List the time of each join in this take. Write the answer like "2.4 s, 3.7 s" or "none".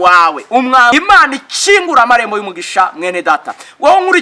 0.9 s